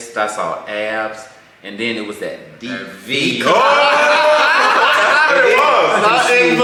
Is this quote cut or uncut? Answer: uncut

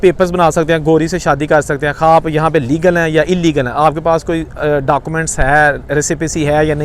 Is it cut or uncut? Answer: uncut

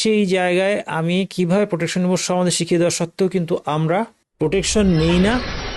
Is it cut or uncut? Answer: cut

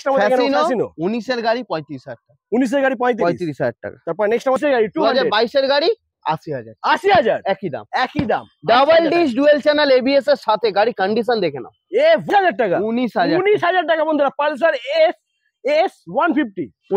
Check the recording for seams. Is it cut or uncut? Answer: cut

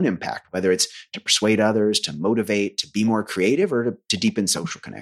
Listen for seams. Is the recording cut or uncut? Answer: uncut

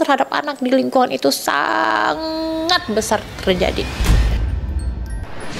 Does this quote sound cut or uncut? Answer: uncut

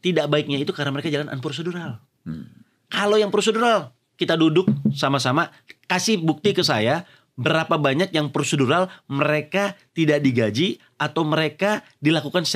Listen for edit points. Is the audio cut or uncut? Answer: uncut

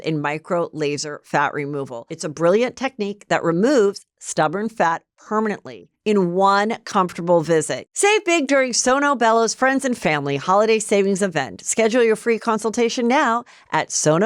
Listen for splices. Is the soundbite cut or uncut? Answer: cut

